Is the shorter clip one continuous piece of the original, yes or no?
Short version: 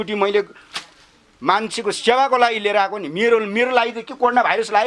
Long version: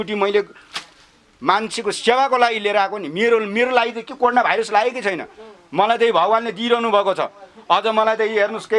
yes